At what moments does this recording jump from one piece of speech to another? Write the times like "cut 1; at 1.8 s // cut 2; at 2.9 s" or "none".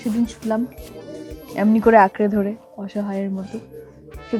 none